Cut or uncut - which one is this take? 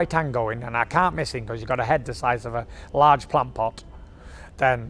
uncut